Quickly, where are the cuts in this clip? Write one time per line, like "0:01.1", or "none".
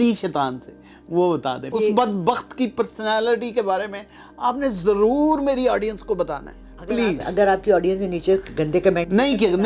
0:01.6